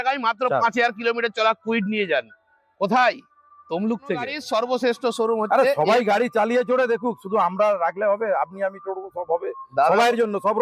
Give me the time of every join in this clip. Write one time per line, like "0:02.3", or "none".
none